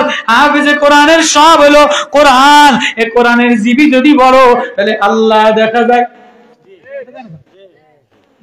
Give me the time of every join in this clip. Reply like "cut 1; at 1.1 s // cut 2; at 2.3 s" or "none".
none